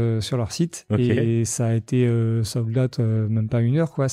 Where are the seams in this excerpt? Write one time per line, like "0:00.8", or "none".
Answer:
none